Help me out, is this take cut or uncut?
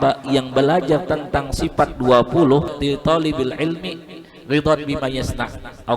cut